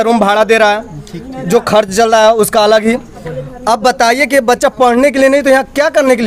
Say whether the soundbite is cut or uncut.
uncut